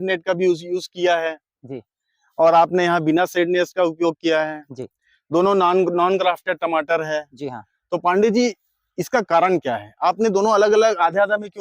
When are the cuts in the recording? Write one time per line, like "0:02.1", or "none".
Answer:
none